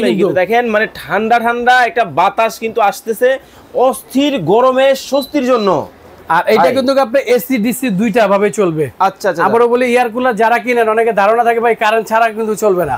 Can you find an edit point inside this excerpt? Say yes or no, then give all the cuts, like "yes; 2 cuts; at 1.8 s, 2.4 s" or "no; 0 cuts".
no; 0 cuts